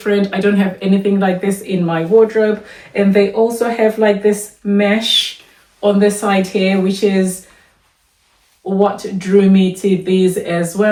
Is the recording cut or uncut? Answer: uncut